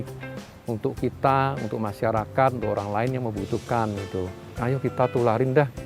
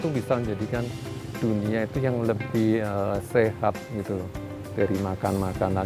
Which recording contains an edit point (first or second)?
first